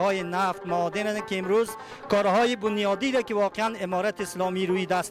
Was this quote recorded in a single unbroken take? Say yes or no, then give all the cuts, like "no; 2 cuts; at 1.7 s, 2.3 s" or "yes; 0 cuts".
yes; 0 cuts